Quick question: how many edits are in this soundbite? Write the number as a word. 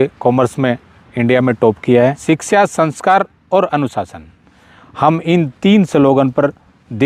one